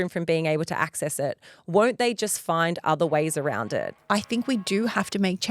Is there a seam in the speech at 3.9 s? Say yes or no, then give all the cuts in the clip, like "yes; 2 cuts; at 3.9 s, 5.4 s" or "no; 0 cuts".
yes; 1 cut; at 3.9 s